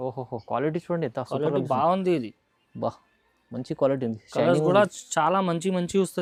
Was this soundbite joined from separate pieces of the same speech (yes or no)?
no